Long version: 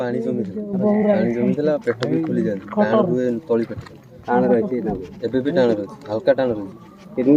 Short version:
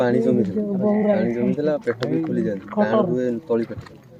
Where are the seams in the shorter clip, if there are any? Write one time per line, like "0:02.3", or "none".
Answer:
none